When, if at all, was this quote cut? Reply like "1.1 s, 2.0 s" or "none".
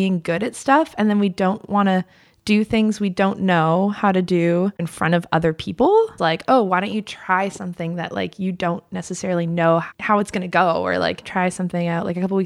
4.9 s, 6.2 s, 9.9 s, 11.2 s